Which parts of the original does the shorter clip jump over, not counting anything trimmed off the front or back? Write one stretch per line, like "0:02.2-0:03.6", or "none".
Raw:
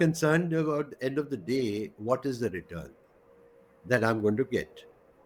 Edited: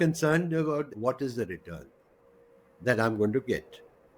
0:00.9-0:02.0